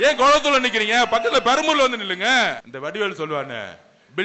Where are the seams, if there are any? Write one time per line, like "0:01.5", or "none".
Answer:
0:02.7